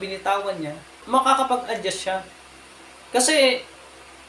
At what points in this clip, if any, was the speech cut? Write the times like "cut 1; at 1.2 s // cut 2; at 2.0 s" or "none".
cut 1; at 1.0 s